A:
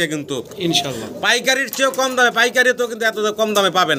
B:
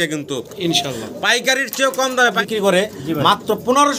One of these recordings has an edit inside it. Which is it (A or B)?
B